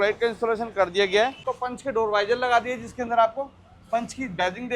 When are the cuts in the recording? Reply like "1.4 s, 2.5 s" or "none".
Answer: 1.5 s